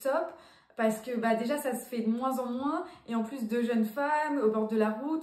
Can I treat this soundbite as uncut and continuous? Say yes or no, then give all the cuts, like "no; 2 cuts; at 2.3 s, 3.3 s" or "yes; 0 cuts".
yes; 0 cuts